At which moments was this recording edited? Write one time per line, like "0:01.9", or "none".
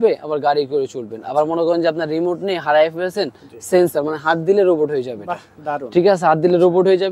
none